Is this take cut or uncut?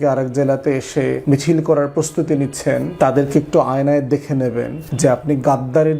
cut